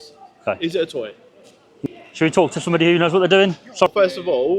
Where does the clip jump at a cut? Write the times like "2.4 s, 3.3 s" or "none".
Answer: 1.8 s, 3.9 s